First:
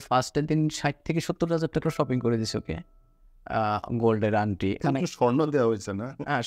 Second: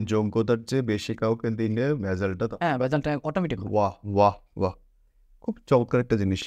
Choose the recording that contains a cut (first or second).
first